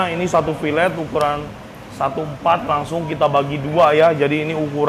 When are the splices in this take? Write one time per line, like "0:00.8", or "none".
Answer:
none